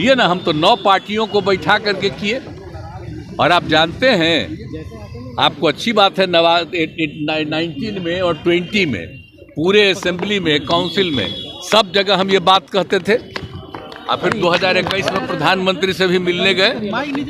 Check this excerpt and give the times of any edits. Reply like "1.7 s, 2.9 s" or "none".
none